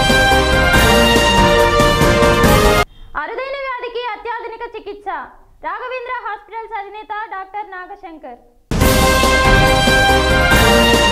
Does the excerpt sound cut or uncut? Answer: cut